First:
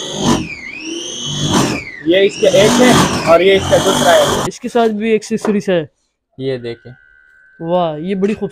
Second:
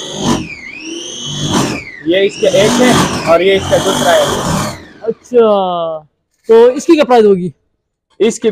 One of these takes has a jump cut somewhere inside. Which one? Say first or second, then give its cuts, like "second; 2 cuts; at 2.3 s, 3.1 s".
first; 1 cut; at 4.5 s